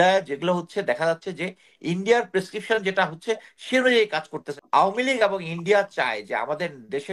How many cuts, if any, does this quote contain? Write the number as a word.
one